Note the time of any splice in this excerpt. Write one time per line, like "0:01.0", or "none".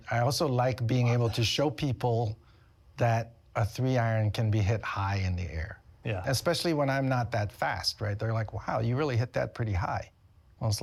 none

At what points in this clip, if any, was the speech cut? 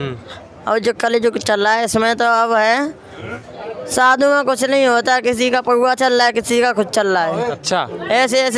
0:03.3
0:07.6

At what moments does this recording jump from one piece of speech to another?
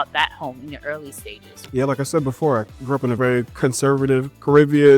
0:01.6
0:03.2

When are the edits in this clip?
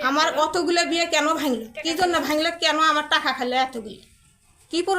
none

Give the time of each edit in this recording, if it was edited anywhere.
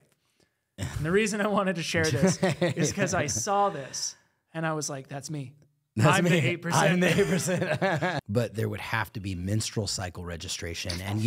0:08.2

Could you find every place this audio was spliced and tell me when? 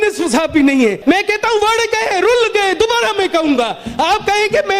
0:01.0

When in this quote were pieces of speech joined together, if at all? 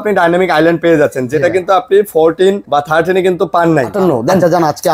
0:02.6
0:03.9

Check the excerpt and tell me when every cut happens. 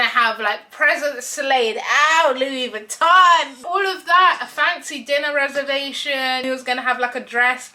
0:03.6
0:06.4

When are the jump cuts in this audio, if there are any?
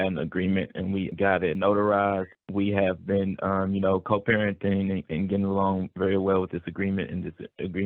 0:01.1
0:02.3

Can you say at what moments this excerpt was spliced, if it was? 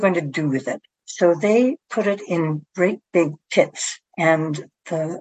none

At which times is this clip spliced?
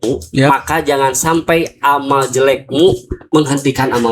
0:03.1

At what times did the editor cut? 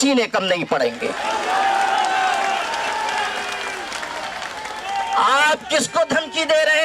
none

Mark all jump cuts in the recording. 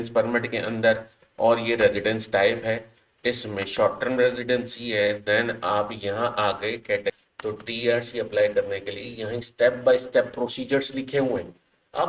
0:07.3

